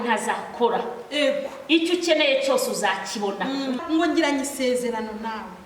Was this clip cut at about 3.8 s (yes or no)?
yes